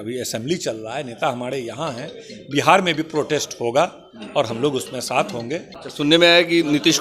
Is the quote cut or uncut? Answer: cut